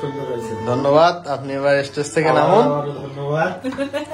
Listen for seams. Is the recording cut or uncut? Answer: uncut